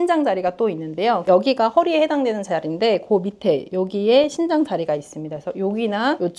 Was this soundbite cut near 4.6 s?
no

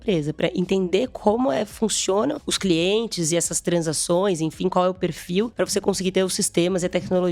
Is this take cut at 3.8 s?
no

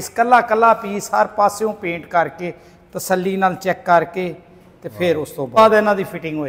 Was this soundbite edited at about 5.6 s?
yes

